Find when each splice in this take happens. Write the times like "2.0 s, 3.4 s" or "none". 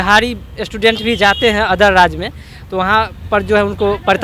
none